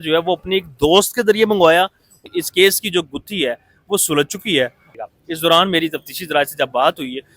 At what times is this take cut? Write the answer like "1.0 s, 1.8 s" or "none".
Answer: 2.2 s, 4.9 s